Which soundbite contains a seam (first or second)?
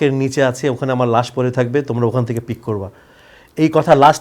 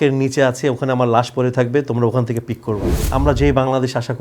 second